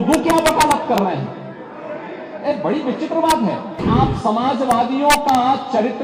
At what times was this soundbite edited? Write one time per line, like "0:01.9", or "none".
0:03.8